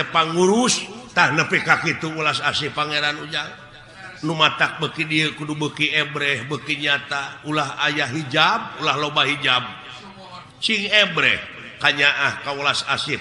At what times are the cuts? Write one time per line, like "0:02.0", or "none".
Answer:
0:00.9

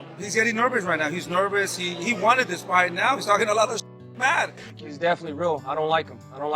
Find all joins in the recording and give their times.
0:04.6

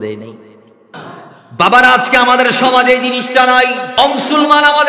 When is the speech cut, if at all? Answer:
0:01.0
0:03.9

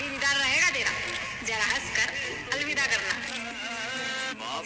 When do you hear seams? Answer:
0:03.3

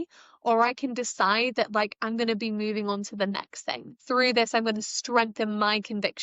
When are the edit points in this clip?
0:04.0

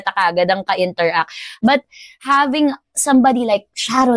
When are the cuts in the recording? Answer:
0:01.4

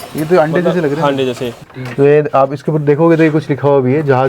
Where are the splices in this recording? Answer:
0:01.7

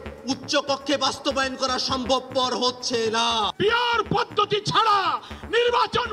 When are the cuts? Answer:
0:03.5

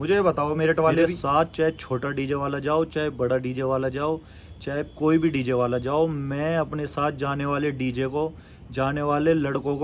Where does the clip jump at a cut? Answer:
0:01.0

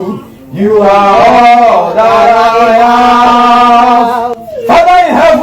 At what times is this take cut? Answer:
none

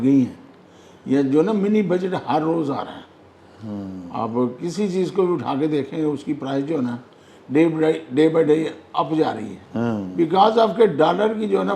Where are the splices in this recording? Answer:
none

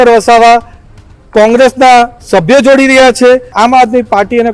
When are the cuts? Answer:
0:03.5

